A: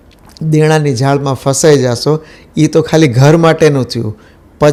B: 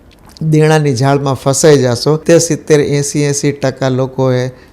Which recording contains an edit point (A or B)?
B